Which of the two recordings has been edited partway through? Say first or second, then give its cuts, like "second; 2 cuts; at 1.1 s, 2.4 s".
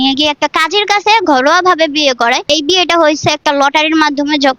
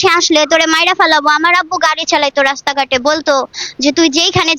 first; 1 cut; at 2.5 s